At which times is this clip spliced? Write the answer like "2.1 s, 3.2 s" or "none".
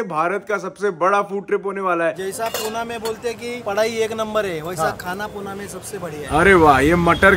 2.2 s, 6.2 s